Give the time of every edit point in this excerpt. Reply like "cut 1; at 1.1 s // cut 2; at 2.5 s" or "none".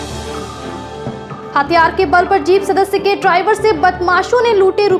cut 1; at 0.9 s